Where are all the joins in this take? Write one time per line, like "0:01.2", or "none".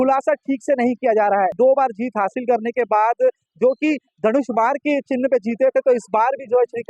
0:01.5